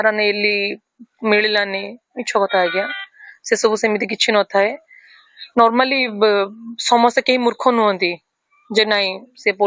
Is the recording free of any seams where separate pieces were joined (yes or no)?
no